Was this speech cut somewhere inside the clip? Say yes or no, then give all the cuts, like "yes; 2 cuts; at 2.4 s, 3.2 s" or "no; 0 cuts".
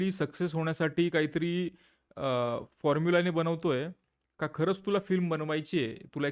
no; 0 cuts